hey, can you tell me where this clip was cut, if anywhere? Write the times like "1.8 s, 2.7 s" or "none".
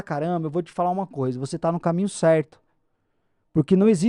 none